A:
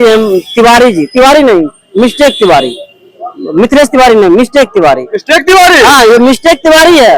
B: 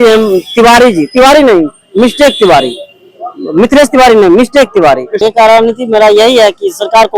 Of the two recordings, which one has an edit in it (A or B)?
B